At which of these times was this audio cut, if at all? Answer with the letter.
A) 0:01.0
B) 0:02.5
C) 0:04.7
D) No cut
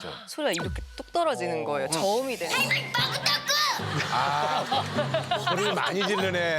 B